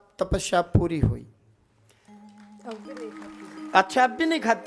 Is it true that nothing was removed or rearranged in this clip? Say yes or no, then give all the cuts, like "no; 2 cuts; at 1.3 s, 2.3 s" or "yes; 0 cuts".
yes; 0 cuts